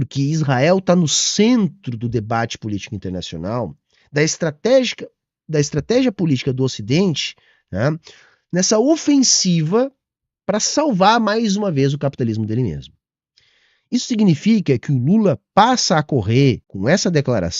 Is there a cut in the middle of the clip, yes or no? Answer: yes